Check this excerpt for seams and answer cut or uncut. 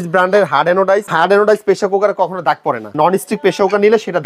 cut